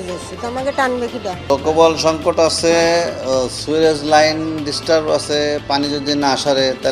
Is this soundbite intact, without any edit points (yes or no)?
no